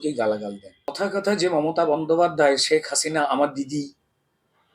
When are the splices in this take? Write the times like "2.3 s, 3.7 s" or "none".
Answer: 0.9 s